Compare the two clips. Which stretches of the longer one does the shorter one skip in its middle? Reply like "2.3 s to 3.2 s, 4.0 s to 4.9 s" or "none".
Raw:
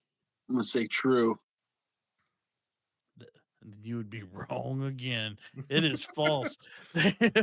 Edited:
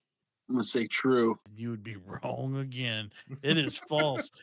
1.5 s to 3.8 s

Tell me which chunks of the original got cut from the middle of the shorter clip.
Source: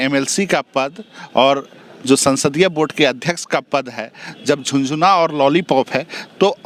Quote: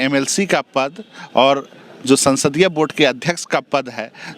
none

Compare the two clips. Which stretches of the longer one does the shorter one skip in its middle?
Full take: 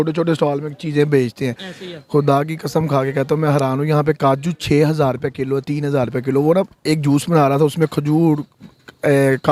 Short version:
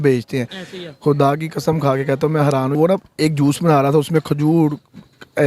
3.9 s to 6.4 s

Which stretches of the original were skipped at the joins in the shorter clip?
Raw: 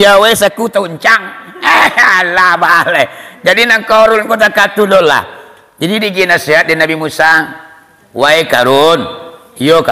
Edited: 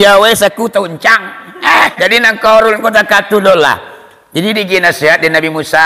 1.9 s to 3.4 s

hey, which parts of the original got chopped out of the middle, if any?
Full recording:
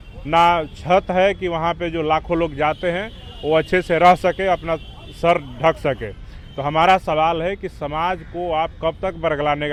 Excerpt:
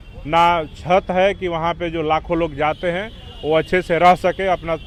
none

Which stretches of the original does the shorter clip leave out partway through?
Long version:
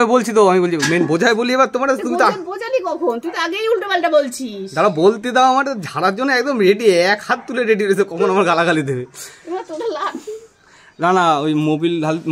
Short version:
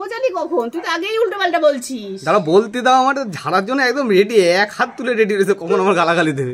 none

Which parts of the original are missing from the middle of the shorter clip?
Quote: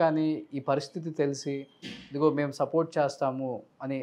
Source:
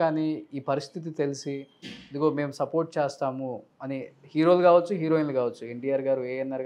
none

